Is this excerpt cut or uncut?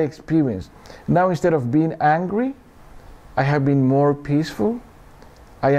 uncut